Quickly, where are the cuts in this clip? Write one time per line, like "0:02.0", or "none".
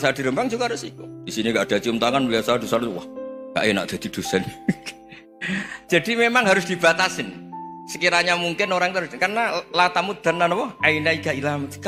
none